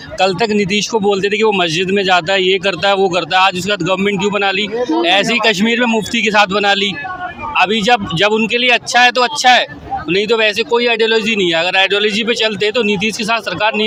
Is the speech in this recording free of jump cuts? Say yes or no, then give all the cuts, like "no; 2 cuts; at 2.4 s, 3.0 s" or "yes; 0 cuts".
yes; 0 cuts